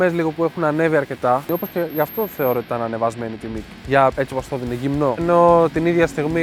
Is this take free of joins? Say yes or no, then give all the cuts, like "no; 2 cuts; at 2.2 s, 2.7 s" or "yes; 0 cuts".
no; 2 cuts; at 1.5 s, 5.2 s